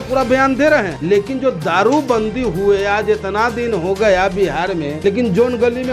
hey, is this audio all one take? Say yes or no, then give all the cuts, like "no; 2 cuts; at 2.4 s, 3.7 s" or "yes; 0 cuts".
no; 2 cuts; at 0.9 s, 4.9 s